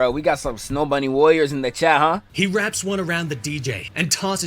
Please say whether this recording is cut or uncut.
cut